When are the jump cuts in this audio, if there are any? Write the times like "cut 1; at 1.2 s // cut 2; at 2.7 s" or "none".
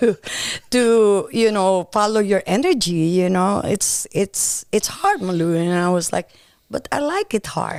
none